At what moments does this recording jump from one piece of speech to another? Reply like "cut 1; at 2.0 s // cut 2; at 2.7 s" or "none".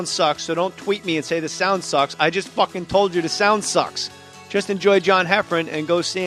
cut 1; at 3.9 s